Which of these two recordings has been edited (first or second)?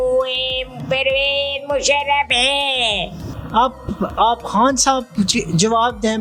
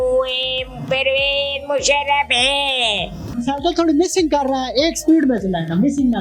second